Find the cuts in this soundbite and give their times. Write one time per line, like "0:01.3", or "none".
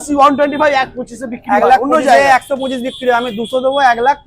none